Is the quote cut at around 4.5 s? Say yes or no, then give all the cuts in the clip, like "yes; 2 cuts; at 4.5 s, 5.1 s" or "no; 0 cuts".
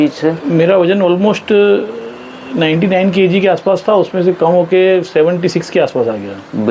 no; 0 cuts